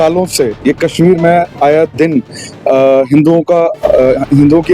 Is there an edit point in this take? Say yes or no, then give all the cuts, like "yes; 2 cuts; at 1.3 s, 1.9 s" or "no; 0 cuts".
no; 0 cuts